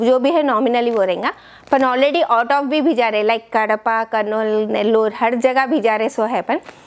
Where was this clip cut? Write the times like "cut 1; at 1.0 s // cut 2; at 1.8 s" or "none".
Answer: none